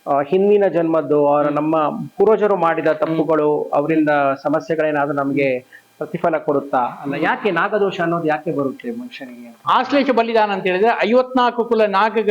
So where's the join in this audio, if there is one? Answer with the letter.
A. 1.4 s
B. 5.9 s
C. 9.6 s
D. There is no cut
C